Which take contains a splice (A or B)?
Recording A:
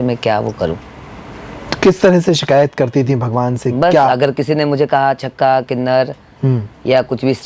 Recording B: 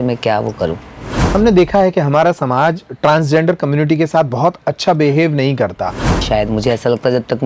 B